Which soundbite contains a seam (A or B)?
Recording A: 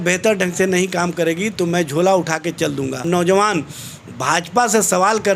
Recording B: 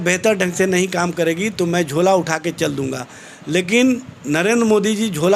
A